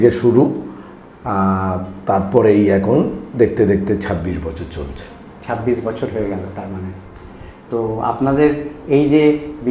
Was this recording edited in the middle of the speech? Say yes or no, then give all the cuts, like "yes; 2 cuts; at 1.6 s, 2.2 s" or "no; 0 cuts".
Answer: no; 0 cuts